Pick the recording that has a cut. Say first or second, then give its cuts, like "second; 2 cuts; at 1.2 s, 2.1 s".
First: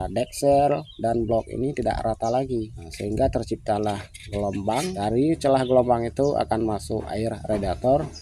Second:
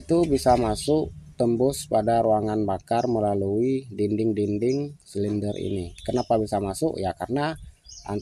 first; 2 cuts; at 2.8 s, 4.9 s